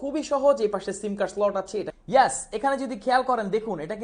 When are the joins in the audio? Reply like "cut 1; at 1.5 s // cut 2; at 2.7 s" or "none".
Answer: cut 1; at 2.0 s